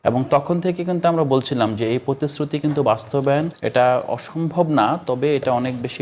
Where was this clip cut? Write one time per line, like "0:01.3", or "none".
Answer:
0:03.6